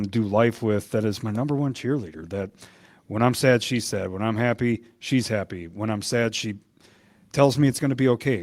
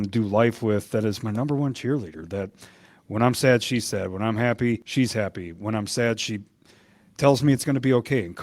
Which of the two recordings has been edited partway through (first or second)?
second